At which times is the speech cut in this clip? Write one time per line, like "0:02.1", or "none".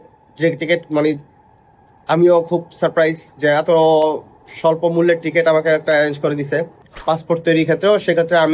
0:06.8